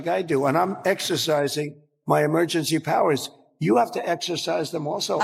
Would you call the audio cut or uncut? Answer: uncut